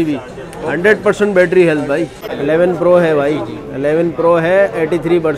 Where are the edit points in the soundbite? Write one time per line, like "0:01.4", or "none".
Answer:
0:02.2

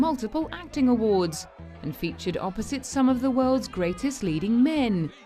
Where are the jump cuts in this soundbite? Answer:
none

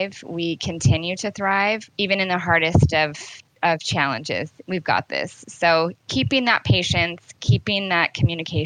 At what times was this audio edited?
none

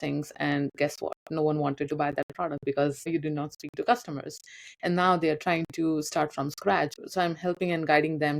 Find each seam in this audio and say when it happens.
0:03.1
0:07.0

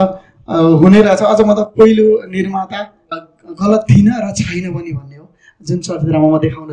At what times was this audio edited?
0:03.2

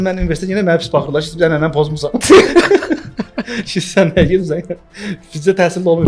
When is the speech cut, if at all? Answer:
none

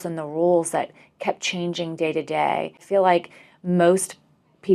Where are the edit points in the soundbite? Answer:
0:02.8

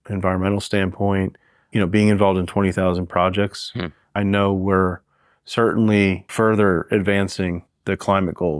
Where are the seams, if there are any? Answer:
0:01.6
0:04.1
0:06.3
0:07.7

